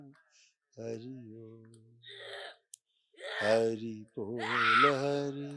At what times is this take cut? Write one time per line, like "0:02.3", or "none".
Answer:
none